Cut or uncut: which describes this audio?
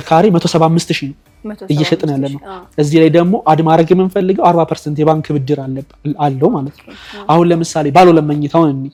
uncut